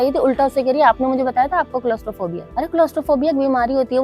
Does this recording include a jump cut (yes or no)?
no